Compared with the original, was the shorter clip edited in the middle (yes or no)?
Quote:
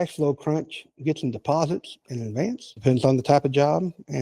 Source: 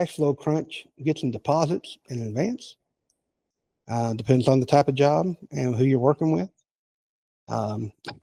yes